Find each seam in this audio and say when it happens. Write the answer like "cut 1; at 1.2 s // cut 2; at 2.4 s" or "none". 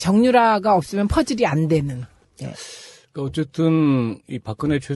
cut 1; at 3.7 s